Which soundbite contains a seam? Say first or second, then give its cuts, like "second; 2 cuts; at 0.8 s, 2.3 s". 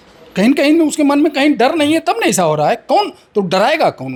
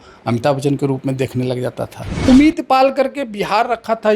second; 1 cut; at 2.3 s